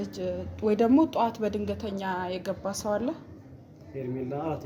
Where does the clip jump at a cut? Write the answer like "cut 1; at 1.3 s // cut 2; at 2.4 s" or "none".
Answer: none

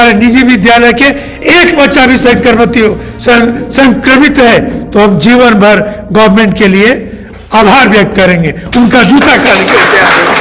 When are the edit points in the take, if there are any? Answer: none

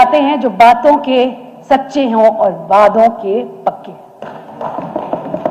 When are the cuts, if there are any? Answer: none

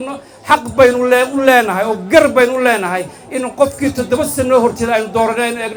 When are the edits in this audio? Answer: none

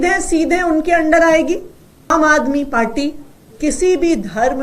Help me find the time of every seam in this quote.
cut 1; at 2.1 s

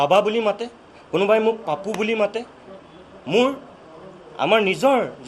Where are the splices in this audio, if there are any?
none

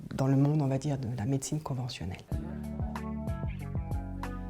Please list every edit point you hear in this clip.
cut 1; at 2.2 s

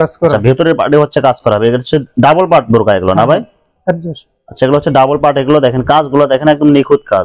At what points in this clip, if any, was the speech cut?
none

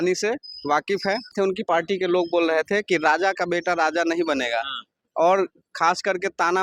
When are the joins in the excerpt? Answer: cut 1; at 1.3 s

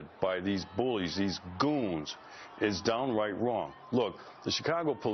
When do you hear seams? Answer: none

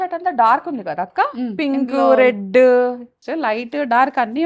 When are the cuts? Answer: cut 1; at 3.1 s

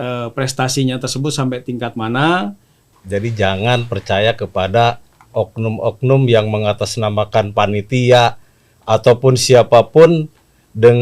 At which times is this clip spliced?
cut 1; at 3.0 s

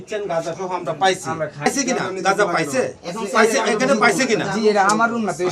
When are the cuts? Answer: cut 1; at 1.7 s

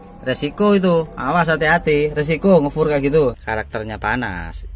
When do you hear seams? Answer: cut 1; at 3.4 s

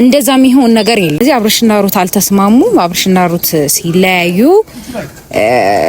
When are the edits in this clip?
cut 1; at 1.2 s

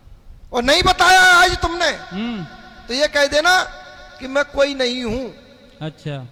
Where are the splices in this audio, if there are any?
none

